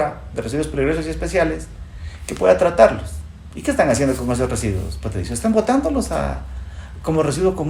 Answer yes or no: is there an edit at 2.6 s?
no